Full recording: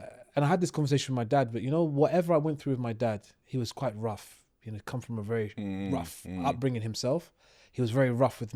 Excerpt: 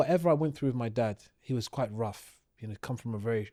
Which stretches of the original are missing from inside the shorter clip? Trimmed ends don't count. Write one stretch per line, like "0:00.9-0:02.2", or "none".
none